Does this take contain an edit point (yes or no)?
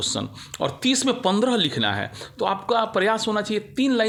no